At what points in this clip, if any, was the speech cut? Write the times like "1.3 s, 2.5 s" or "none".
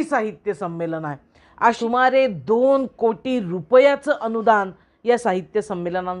1.8 s